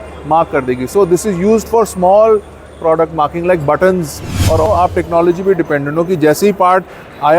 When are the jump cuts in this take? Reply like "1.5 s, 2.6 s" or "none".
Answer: 4.7 s